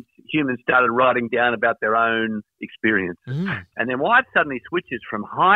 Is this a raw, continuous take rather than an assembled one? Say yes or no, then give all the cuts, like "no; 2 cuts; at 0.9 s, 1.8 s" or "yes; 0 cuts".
no; 1 cut; at 3.6 s